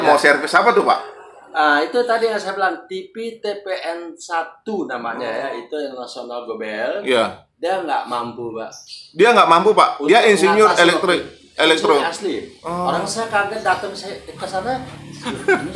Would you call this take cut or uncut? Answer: uncut